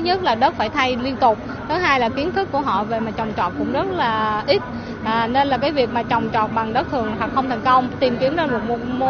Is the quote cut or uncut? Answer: uncut